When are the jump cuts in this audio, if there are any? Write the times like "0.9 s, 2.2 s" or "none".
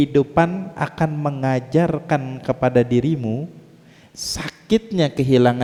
none